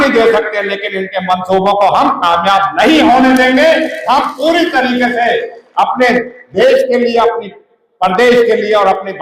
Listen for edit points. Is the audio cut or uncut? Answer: uncut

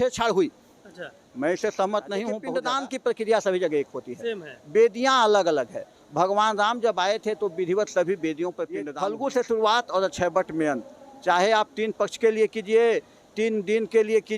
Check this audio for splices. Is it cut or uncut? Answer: cut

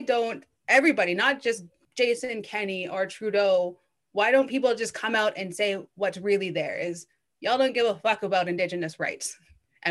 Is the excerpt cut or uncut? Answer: cut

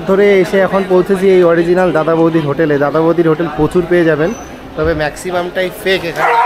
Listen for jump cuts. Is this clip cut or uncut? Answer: uncut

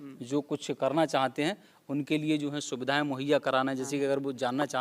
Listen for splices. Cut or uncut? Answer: uncut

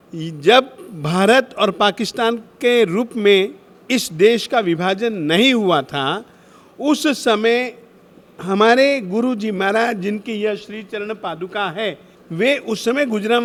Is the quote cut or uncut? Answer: uncut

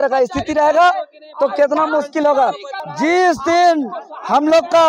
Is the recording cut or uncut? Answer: cut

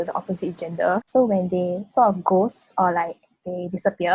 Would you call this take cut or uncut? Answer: cut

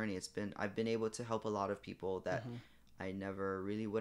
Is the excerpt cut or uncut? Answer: uncut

